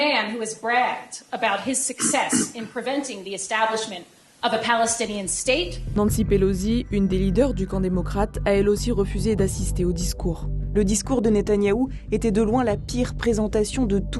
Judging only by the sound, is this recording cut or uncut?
cut